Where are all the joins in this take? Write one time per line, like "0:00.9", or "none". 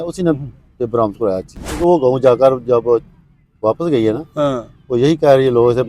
0:01.8